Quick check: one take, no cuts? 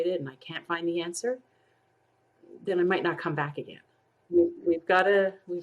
no; 1 cut; at 4.2 s

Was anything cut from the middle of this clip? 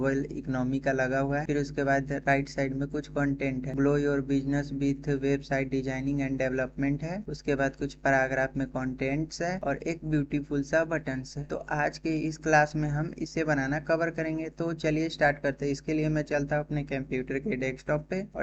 no; 0 cuts

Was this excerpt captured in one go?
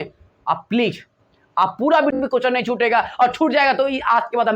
no; 1 cut; at 2.1 s

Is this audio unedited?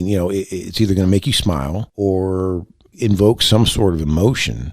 no; 1 cut; at 1.8 s

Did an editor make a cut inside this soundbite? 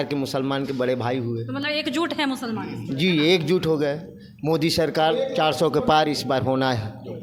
no; 0 cuts

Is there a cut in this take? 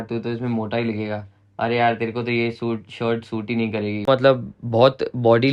yes; 1 cut; at 4.0 s

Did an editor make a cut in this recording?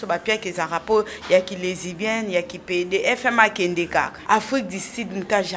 yes; 1 cut; at 4.2 s

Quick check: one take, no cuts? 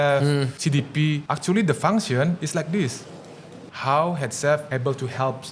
no; 3 cuts; at 1.0 s, 3.7 s, 4.7 s

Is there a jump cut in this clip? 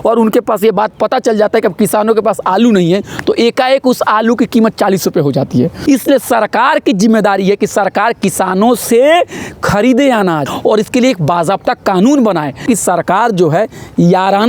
yes; 3 cuts; at 5.8 s, 10.5 s, 12.6 s

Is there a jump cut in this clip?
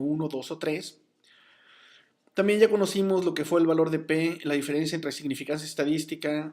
yes; 1 cut; at 1.3 s

